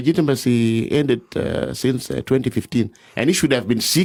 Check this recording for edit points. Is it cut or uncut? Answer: uncut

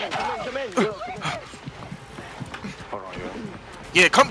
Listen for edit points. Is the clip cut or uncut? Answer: uncut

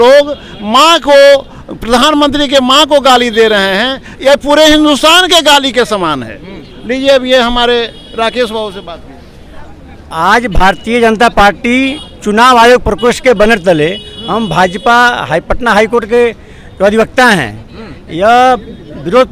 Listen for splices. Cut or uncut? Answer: uncut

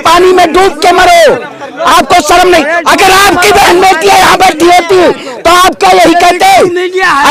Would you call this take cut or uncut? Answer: uncut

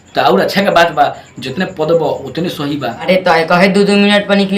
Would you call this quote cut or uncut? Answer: cut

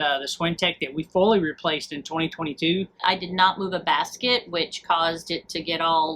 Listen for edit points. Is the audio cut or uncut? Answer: cut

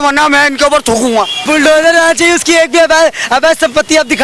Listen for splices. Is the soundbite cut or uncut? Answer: cut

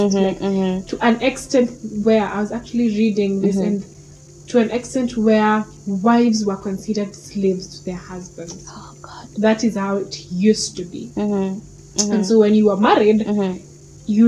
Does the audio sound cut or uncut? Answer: uncut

